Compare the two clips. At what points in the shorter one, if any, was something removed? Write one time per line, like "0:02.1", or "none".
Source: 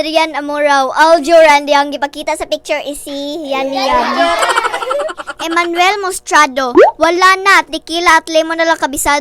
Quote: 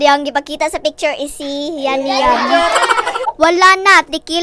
0:03.3